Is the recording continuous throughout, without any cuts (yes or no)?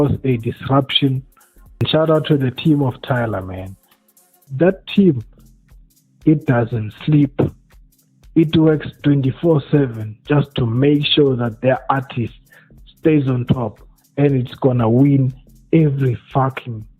no